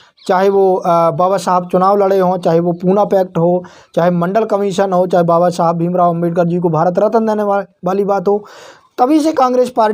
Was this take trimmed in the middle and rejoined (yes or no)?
no